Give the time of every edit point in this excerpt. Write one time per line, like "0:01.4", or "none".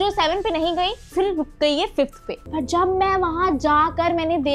0:02.4

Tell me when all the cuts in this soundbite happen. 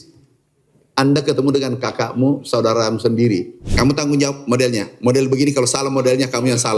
0:03.6

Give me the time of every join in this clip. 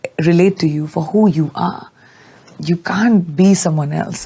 none

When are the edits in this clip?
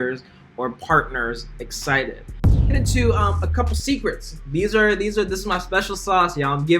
0:02.7

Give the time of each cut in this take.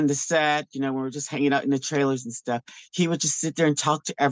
none

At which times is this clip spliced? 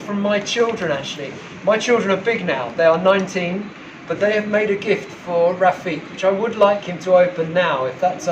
none

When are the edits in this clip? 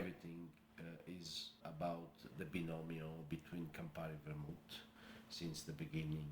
0:01.6
0:02.2

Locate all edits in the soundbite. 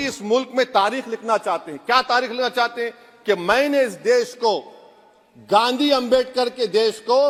none

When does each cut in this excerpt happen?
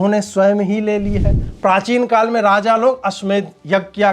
0:01.5

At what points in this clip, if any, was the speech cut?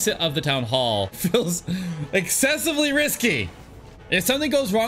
0:01.2
0:03.9

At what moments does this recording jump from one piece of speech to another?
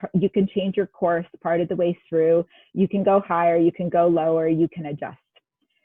none

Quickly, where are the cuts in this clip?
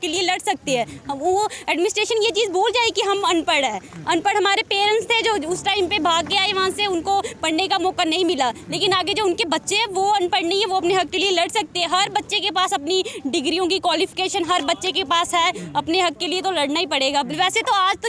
none

